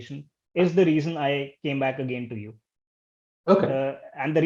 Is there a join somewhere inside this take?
no; 0 cuts

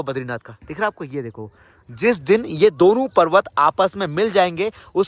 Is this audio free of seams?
yes; 0 cuts

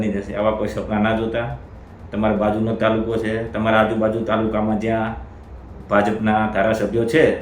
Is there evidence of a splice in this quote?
no; 0 cuts

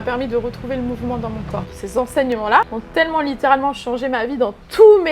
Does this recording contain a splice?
yes; 2 cuts; at 1.8 s, 2.8 s

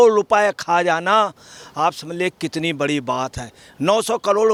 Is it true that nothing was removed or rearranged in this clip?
yes; 0 cuts

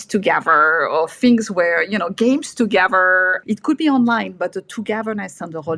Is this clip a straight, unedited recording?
yes; 0 cuts

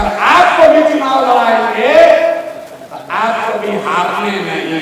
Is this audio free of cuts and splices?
yes; 0 cuts

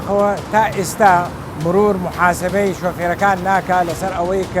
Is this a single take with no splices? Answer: no; 1 cut; at 1.4 s

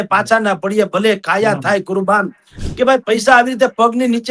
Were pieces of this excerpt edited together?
yes; 1 cut; at 2.6 s

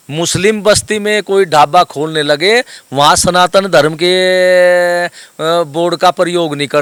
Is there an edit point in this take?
no; 0 cuts

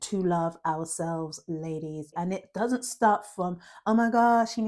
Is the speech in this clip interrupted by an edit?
yes; 1 cut; at 2.1 s

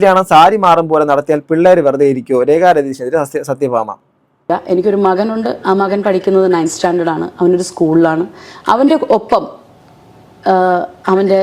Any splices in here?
yes; 1 cut; at 4.5 s

